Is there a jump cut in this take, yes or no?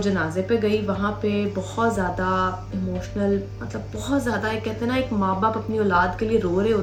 no